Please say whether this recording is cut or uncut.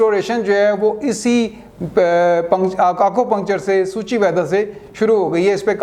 uncut